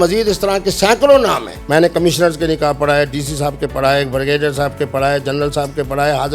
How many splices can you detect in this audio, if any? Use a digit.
1